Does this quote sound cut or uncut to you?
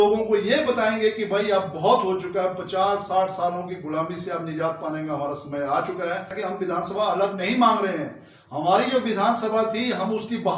cut